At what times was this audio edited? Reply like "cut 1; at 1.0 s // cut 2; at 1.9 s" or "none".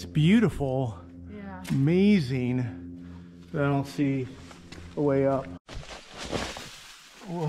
cut 1; at 5.6 s